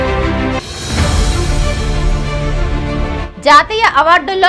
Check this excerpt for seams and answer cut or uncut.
uncut